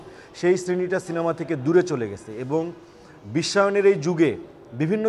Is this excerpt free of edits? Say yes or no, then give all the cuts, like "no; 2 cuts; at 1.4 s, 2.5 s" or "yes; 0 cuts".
yes; 0 cuts